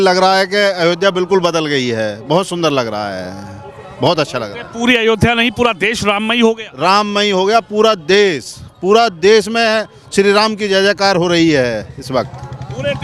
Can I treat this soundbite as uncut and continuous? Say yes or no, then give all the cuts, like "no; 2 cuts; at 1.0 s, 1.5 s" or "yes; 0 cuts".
yes; 0 cuts